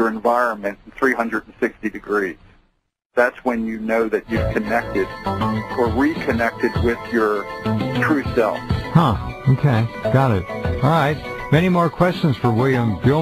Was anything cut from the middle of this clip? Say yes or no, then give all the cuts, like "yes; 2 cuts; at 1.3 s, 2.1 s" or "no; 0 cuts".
no; 0 cuts